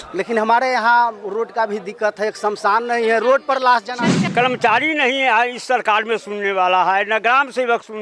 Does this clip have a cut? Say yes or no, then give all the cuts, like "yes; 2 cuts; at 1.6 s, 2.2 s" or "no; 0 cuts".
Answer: yes; 1 cut; at 4.2 s